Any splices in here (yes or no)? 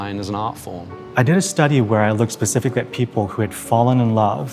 yes